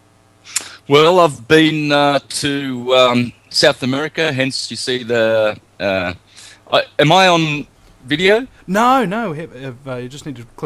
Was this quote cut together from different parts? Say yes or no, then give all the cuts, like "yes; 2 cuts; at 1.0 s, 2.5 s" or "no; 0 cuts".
yes; 1 cut; at 5.2 s